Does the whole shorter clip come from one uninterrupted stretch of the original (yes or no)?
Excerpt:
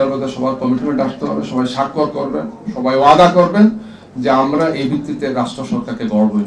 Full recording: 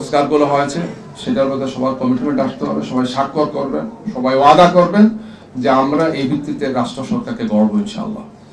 yes